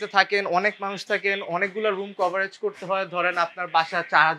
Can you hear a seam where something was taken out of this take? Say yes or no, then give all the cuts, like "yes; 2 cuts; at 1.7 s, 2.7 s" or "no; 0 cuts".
no; 0 cuts